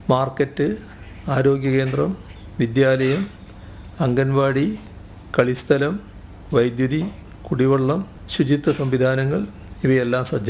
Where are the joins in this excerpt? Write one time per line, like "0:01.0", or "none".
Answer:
0:08.2